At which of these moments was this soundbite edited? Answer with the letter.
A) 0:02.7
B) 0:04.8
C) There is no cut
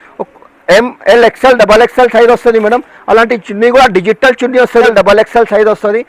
B